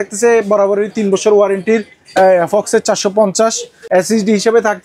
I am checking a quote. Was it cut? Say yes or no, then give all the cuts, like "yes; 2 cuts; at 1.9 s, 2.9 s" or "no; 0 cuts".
yes; 1 cut; at 3.7 s